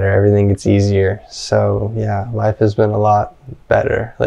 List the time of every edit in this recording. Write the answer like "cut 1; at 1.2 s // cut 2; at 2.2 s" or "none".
none